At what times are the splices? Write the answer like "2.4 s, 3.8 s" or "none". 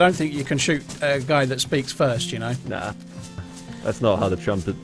none

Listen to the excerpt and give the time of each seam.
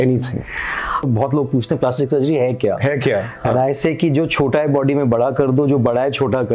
1.1 s

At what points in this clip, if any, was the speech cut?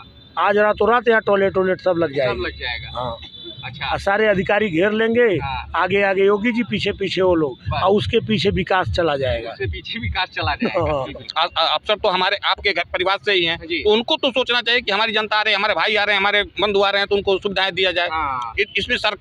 11.2 s

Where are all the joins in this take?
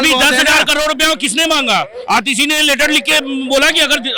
none

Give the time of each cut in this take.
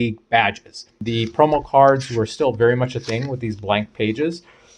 1.0 s

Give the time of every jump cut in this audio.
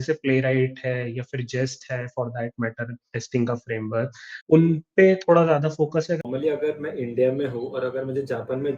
4.5 s, 6.2 s

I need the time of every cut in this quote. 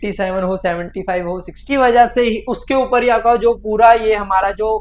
1.5 s

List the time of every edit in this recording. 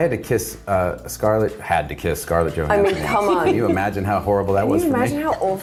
none

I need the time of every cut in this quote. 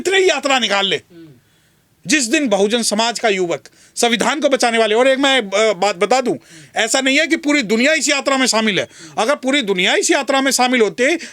none

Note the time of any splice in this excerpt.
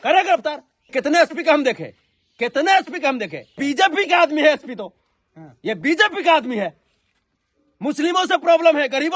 0.9 s, 3.6 s

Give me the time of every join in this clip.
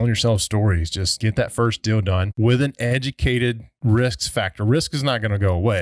1.1 s, 2.3 s, 3.7 s

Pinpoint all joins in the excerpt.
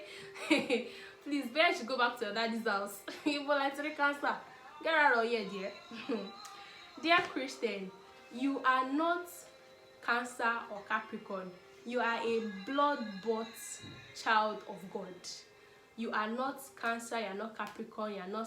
none

